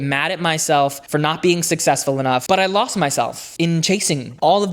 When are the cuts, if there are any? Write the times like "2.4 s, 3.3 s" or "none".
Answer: 2.4 s